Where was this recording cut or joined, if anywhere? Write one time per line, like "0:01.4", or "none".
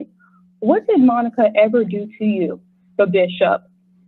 none